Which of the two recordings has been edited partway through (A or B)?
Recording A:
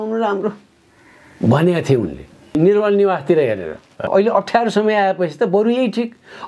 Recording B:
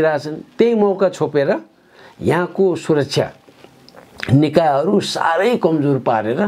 A